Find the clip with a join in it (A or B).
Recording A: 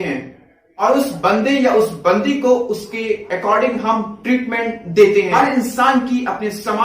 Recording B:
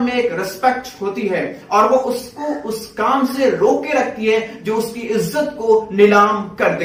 A